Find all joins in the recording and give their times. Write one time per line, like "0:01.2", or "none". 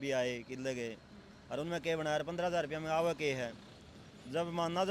none